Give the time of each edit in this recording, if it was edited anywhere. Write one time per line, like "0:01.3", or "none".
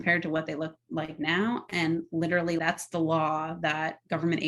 none